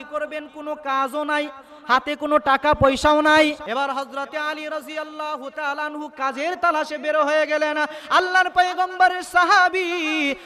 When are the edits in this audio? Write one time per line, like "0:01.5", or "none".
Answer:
0:03.6

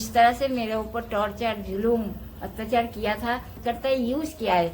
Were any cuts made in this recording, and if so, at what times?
0:03.6

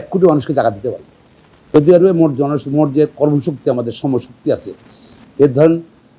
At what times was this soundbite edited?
0:01.7

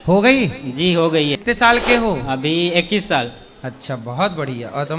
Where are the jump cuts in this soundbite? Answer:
0:01.4

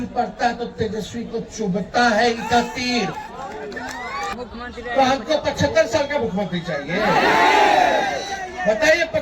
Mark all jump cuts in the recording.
0:04.3

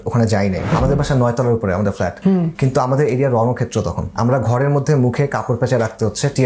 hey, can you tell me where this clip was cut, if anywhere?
0:00.7
0:02.3
0:04.0

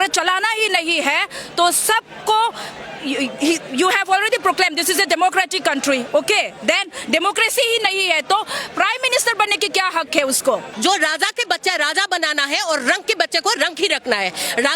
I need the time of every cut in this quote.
0:10.7

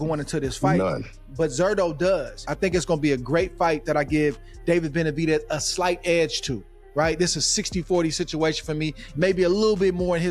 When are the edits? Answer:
0:02.5

